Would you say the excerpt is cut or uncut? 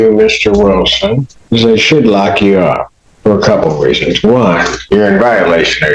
uncut